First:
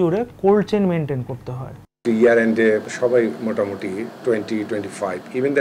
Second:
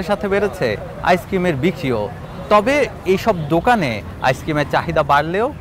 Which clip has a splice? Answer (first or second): first